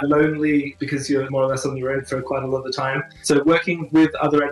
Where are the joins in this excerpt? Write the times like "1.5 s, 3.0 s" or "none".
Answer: 1.1 s, 3.1 s